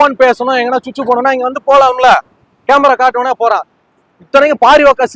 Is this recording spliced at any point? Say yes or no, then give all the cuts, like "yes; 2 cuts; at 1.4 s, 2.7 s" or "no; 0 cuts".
no; 0 cuts